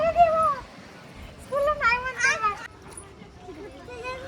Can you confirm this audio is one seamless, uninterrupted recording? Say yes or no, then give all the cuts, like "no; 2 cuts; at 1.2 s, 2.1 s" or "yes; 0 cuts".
no; 1 cut; at 2.6 s